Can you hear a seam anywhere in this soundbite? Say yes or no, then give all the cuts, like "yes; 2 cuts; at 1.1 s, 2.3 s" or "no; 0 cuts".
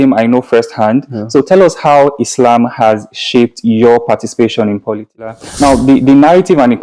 yes; 1 cut; at 5.4 s